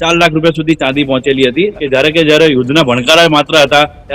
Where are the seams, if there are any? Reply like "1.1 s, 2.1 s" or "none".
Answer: 1.7 s

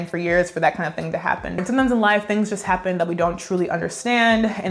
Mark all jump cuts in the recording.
1.5 s

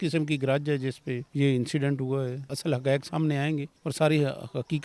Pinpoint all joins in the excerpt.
1.2 s, 2.5 s, 3.8 s

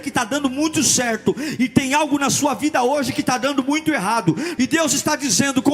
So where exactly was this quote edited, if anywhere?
4.5 s

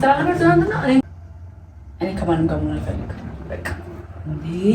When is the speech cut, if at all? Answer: 1.0 s

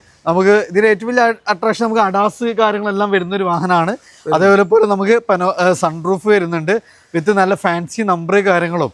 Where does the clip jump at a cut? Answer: none

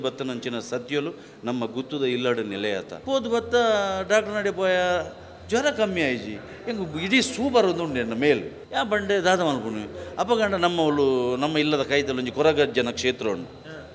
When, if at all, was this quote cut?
2.9 s, 8.6 s

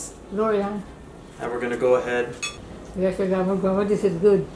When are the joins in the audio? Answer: 2.5 s

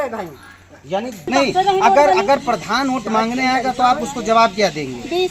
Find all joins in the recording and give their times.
1.2 s

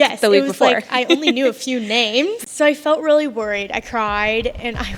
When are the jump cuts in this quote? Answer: 2.4 s

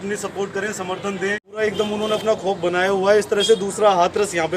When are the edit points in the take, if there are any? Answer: 1.6 s

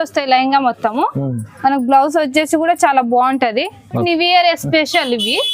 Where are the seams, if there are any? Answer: 4.0 s

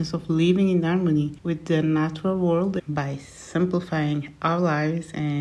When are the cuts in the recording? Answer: 1.4 s, 2.8 s

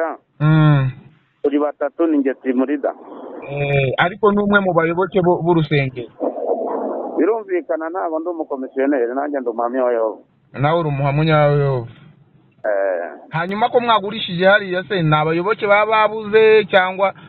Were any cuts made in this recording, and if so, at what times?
none

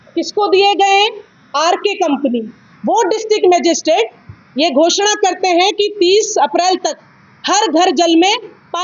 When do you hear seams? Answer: 2.7 s

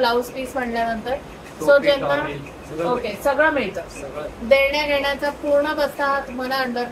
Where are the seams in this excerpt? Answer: none

